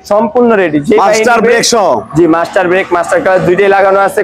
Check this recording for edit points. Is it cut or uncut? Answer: uncut